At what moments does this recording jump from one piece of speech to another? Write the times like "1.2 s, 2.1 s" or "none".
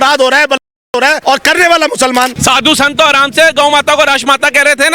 1.2 s, 2.4 s